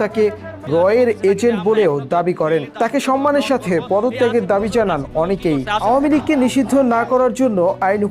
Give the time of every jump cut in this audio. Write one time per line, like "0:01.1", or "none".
0:05.8